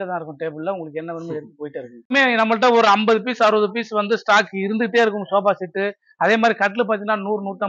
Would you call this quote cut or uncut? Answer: cut